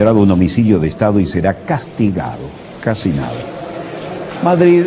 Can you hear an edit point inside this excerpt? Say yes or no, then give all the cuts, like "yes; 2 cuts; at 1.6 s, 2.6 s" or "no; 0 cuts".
yes; 1 cut; at 3.4 s